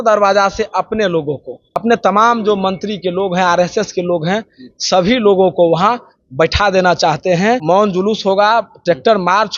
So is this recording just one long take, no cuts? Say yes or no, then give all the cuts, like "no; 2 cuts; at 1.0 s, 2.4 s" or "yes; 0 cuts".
no; 2 cuts; at 1.8 s, 7.6 s